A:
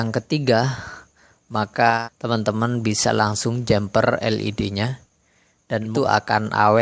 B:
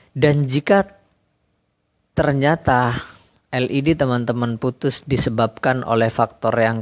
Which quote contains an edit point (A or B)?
A